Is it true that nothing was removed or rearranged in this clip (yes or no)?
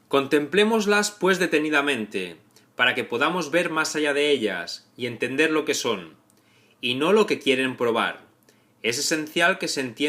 no